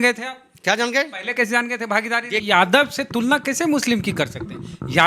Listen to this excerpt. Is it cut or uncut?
cut